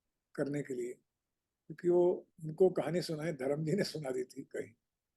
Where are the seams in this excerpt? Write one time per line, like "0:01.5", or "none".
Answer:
0:02.4